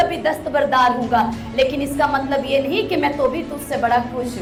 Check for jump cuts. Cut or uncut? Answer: uncut